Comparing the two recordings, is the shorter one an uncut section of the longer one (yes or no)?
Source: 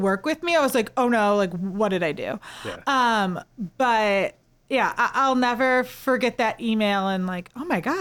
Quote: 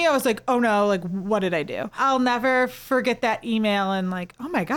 no